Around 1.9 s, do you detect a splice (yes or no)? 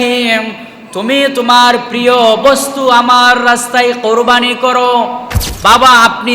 no